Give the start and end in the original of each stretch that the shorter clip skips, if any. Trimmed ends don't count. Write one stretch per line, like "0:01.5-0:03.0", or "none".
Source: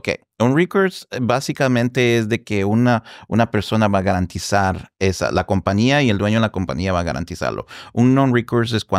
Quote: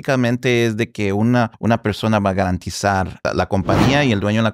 0:03.1-0:03.2
0:04.9-0:05.2